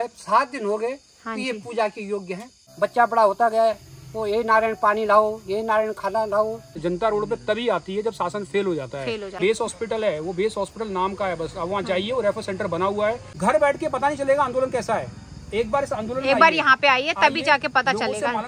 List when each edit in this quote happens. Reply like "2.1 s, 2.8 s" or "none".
2.6 s, 6.8 s, 9.4 s, 13.3 s